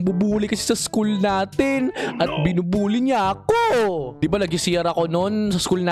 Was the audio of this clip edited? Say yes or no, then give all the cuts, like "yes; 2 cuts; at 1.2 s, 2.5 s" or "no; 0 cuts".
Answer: yes; 1 cut; at 4.2 s